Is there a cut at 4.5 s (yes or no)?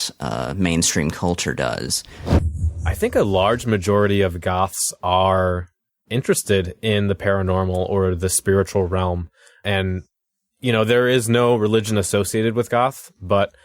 no